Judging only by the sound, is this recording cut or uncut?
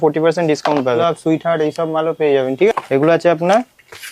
cut